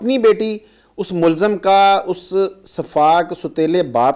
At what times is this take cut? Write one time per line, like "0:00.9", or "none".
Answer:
none

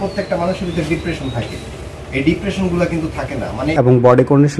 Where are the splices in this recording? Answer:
0:03.7

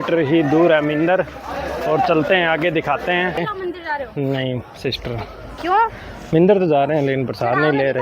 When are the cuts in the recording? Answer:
0:03.4

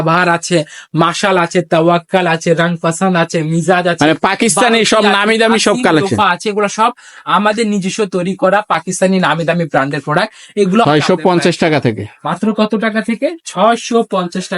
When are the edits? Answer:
0:10.8

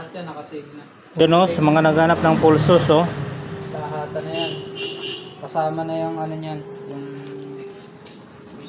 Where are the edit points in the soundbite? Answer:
0:01.2

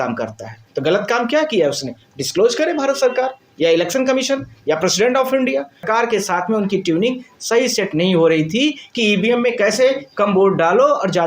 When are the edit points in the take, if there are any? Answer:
0:05.8

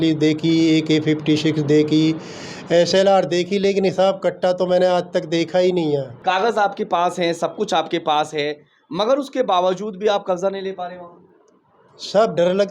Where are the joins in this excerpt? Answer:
0:06.1

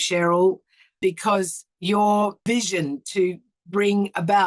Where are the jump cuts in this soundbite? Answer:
0:01.0
0:02.4

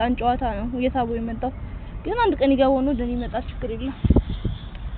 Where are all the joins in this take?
none

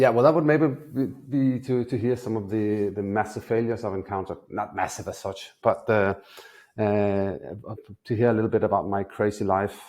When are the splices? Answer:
none

